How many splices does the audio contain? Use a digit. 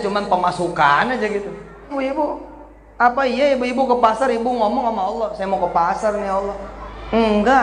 1